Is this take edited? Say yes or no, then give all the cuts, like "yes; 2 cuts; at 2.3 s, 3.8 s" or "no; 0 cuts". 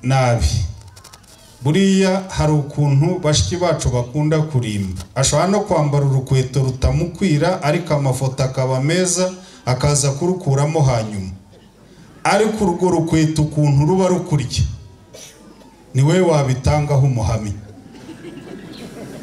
no; 0 cuts